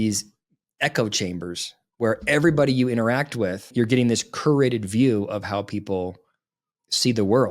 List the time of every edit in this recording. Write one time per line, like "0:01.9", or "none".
0:03.7